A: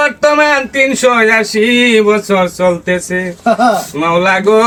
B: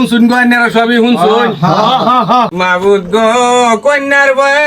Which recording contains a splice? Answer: B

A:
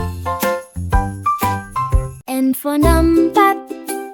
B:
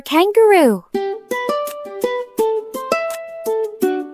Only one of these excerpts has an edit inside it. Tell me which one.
A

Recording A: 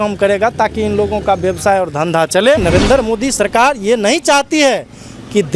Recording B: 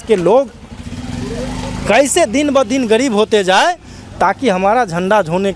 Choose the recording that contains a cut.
A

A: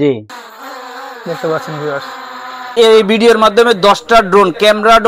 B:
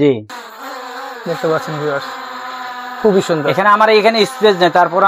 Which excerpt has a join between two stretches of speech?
A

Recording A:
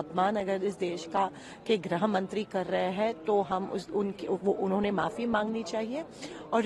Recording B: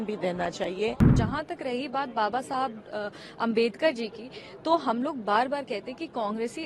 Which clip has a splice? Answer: B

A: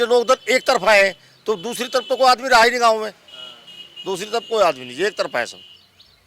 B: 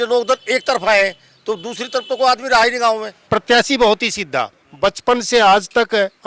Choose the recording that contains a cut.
B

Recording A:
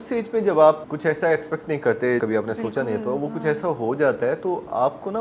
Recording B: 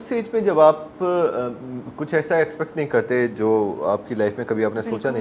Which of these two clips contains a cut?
A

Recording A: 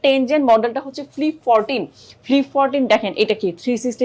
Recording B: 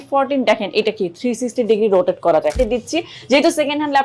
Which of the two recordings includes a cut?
B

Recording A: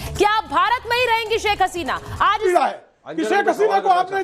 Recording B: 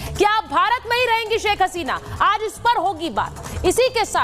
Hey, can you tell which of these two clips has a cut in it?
A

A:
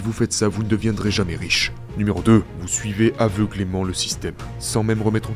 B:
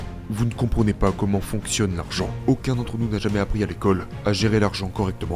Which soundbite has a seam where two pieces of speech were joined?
B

